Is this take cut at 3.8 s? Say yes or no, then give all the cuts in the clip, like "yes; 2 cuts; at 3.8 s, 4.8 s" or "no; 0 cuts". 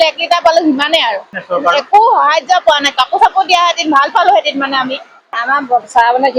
no; 2 cuts; at 1.3 s, 5.3 s